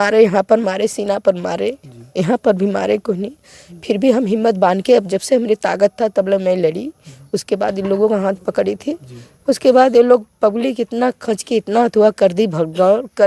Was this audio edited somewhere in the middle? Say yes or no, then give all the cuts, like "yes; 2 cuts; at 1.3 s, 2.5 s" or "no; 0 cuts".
no; 0 cuts